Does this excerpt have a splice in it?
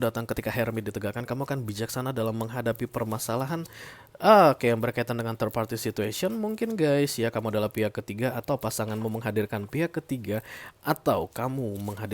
no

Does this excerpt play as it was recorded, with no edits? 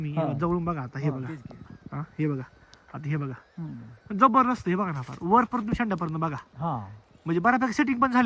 yes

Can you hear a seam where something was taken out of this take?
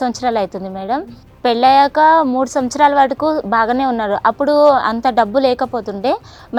no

